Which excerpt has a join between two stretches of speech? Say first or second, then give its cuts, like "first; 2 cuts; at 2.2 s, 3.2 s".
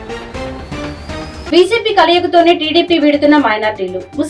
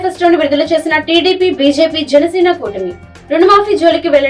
first; 1 cut; at 1.5 s